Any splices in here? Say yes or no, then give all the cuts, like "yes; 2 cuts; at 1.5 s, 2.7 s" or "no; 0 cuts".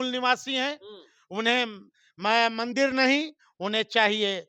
no; 0 cuts